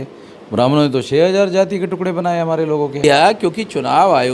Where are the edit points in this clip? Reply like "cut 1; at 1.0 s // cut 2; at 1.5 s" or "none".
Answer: cut 1; at 3.0 s